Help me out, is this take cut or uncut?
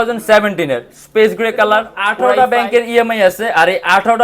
cut